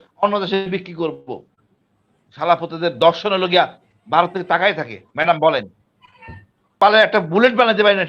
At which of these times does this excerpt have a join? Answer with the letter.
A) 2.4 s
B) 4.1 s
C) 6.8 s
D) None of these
C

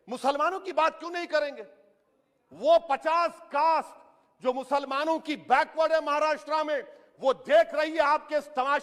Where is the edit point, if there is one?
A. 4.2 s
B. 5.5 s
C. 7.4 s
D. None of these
D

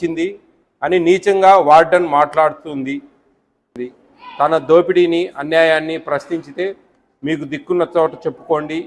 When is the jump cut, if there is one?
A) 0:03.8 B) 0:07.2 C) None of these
A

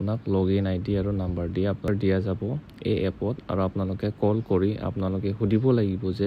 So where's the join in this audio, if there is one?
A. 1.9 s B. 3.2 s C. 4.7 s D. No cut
A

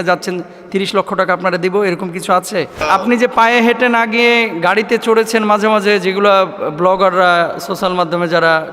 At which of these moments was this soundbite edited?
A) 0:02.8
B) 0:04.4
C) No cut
A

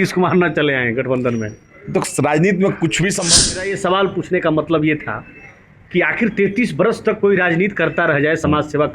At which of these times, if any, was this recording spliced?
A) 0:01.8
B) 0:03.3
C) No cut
B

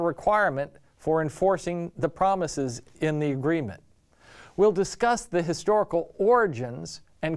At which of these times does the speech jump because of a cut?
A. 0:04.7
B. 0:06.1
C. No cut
A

